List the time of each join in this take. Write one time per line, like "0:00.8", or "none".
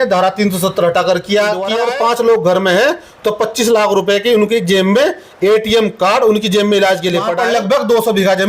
0:01.8
0:07.3